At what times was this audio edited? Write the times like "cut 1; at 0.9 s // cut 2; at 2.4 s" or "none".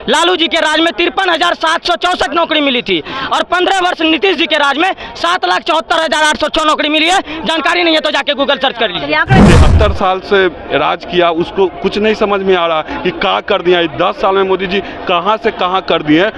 cut 1; at 9.4 s